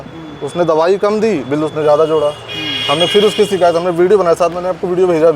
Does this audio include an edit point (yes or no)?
no